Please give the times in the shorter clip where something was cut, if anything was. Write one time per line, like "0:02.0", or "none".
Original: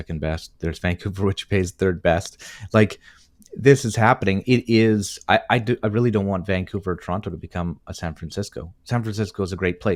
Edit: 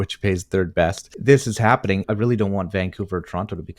0:01.1
0:02.1